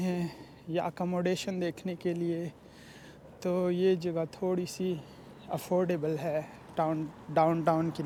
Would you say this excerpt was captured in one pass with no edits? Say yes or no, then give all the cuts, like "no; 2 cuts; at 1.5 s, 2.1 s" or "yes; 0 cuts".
yes; 0 cuts